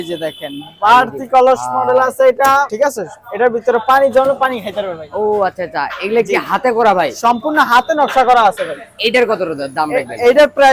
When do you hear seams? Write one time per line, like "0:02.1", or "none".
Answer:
none